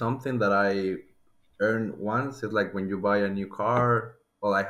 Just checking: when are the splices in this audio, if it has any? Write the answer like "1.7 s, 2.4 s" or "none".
none